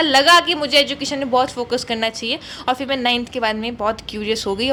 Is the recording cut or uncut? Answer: uncut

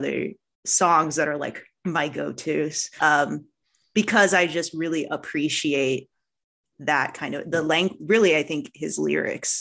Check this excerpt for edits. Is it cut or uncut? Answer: cut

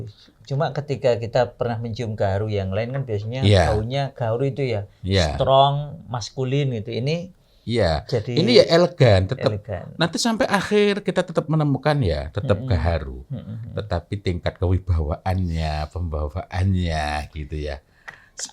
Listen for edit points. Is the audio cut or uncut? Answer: uncut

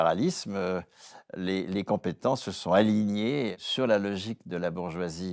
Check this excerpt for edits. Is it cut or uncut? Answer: cut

